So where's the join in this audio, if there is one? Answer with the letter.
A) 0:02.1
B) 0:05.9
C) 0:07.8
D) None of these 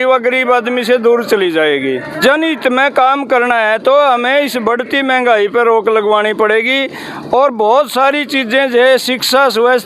A